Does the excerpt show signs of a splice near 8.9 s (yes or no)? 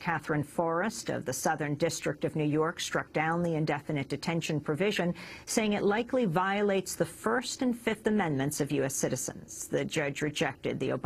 yes